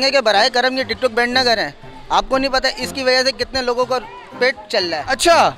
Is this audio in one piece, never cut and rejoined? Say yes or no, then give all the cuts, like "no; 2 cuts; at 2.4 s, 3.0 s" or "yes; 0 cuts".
yes; 0 cuts